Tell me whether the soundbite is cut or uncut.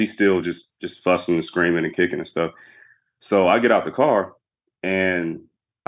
uncut